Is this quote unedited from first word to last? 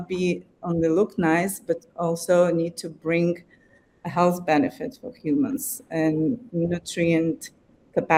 yes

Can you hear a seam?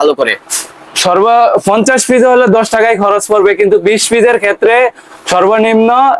no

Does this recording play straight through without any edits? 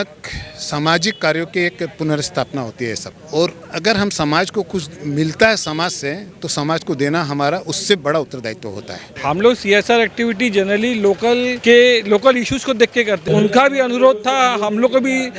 no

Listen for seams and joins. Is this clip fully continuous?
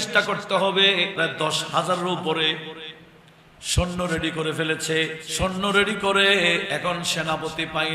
no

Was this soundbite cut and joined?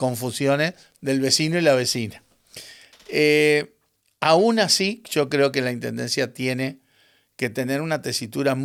no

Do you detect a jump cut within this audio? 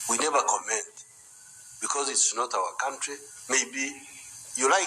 yes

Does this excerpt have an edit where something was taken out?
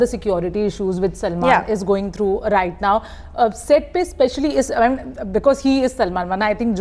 no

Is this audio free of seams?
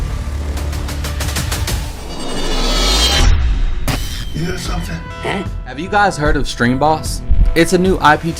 no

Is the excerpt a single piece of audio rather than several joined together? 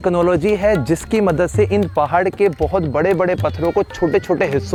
yes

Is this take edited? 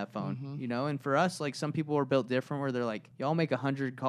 yes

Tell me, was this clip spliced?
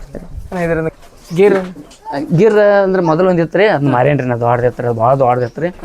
yes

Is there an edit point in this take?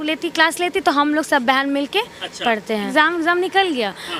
yes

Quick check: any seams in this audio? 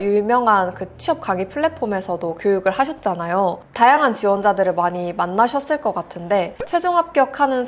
no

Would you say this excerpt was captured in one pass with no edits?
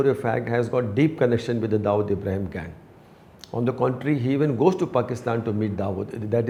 yes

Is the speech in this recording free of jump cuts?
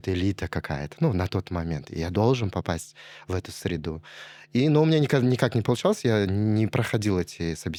yes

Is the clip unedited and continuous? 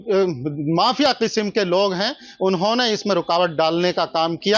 yes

